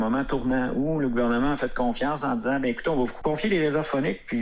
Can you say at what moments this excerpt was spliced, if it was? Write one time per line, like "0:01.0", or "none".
0:03.1